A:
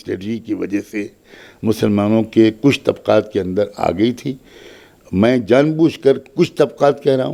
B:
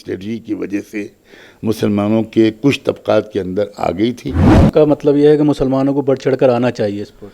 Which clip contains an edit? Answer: B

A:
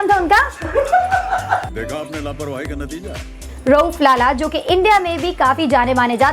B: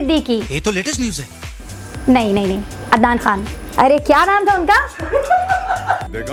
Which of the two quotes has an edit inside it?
A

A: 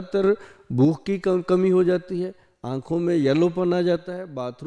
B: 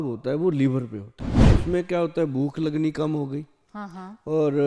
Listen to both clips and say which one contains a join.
B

